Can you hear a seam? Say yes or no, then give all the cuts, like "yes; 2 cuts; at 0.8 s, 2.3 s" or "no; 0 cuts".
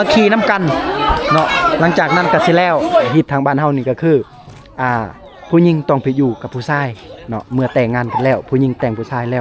yes; 1 cut; at 3.1 s